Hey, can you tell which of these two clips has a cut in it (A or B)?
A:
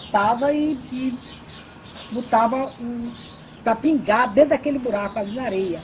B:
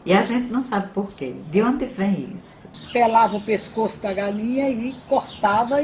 B